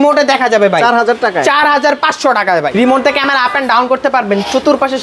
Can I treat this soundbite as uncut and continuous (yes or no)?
no